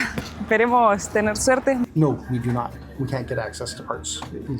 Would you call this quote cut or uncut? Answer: cut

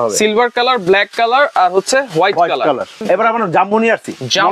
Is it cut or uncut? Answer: cut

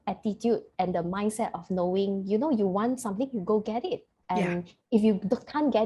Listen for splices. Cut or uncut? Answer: uncut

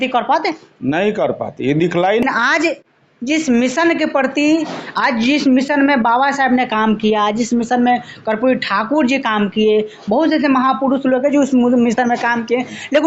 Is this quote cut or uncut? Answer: cut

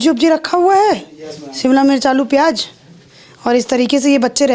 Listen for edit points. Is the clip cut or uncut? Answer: uncut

